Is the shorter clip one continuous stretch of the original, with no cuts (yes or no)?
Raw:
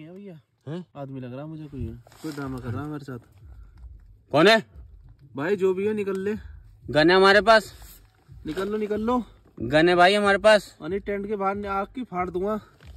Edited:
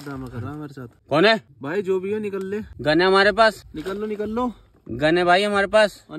no